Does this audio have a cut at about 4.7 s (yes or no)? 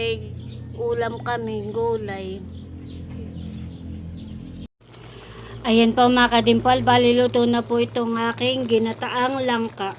yes